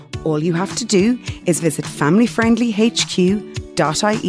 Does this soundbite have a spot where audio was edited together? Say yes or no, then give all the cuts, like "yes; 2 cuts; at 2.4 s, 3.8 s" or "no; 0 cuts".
no; 0 cuts